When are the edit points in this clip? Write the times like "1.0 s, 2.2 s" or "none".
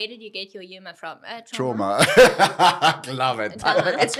none

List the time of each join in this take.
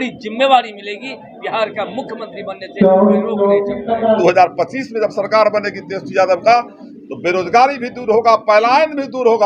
4.2 s

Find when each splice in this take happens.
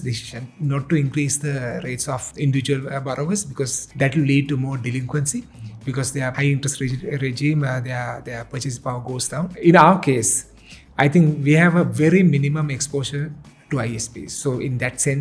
2.3 s, 3.8 s, 6.4 s, 9.5 s

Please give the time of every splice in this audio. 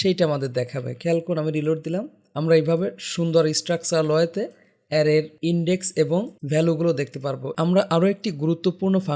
2.2 s, 5.3 s, 6.4 s, 7.5 s

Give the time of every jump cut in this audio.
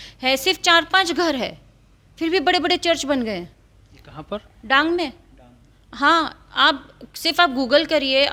none

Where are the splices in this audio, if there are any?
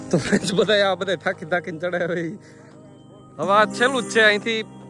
none

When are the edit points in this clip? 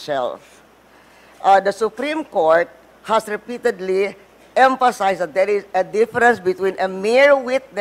none

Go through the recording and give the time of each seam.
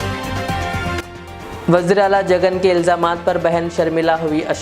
1.0 s

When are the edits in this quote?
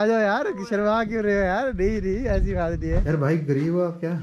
3.0 s

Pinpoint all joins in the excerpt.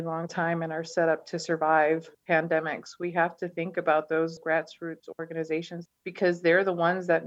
5.7 s

